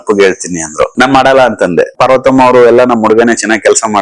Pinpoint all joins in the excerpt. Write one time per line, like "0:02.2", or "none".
0:00.9
0:01.9